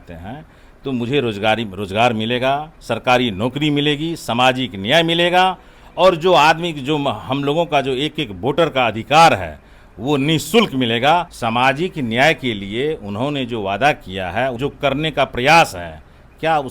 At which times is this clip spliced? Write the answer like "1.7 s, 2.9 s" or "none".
11.3 s, 14.6 s